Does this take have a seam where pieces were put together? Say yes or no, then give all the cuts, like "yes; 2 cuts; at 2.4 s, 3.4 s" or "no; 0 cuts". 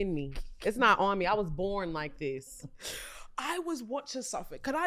no; 0 cuts